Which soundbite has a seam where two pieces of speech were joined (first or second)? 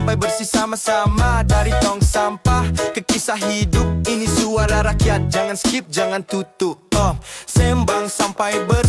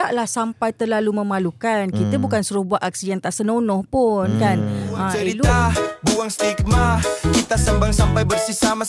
second